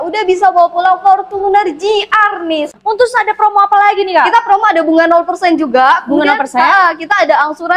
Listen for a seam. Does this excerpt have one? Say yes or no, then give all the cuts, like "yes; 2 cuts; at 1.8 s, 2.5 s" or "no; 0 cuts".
yes; 1 cut; at 2.7 s